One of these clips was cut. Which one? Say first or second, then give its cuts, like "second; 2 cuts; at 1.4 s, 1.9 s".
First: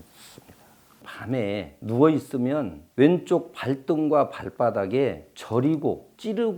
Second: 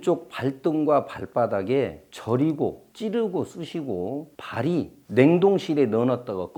first; 1 cut; at 1.1 s